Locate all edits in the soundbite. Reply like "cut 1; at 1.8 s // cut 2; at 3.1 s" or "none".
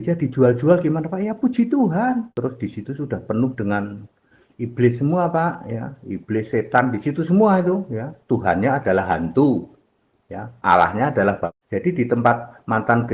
cut 1; at 2.3 s // cut 2; at 11.5 s